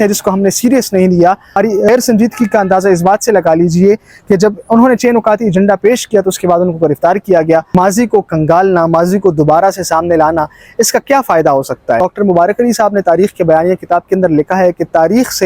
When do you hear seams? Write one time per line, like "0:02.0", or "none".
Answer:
0:01.8
0:07.7
0:12.0